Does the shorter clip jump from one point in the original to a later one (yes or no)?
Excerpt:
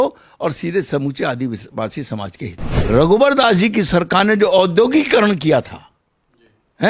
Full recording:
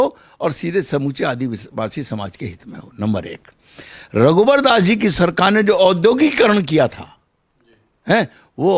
yes